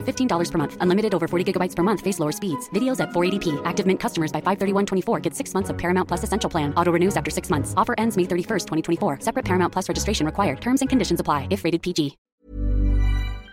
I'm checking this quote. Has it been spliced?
yes; 1 cut; at 12.2 s

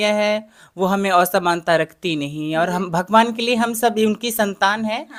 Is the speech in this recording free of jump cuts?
yes; 0 cuts

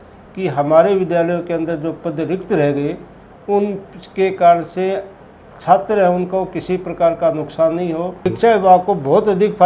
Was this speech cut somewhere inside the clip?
yes; 1 cut; at 8.2 s

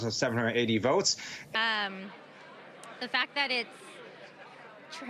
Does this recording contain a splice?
yes; 1 cut; at 1.4 s

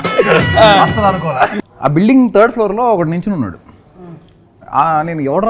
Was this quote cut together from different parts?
yes; 1 cut; at 1.5 s

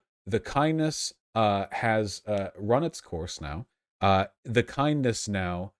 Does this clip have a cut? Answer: no; 0 cuts

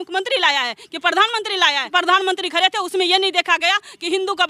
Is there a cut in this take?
yes; 1 cut; at 1.9 s

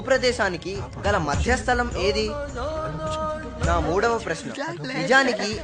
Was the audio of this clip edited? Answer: no; 0 cuts

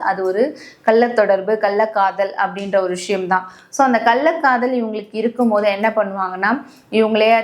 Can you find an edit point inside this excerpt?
no; 0 cuts

